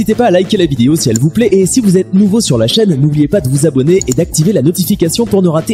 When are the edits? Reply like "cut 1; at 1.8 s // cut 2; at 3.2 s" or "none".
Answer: none